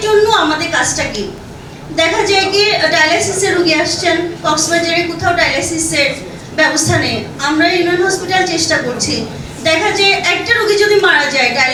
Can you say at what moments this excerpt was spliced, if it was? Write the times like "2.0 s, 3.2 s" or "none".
none